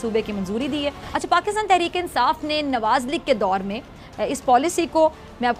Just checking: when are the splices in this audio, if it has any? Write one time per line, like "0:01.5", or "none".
0:01.1